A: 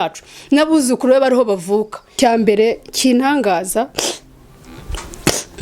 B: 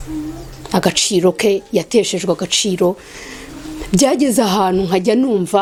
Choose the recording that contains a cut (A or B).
A